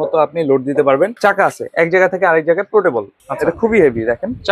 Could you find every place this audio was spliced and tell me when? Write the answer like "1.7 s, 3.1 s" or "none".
1.1 s, 3.2 s